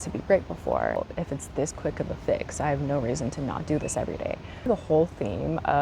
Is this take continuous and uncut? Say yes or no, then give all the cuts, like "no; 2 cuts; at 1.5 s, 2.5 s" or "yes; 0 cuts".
no; 2 cuts; at 1.0 s, 4.5 s